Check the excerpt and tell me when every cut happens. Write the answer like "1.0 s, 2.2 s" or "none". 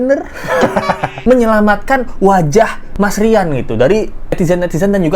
1.1 s